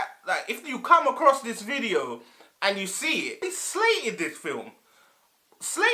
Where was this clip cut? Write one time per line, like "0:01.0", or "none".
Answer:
0:03.4